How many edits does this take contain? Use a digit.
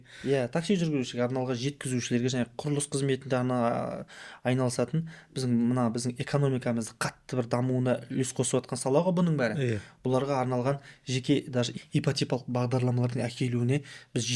0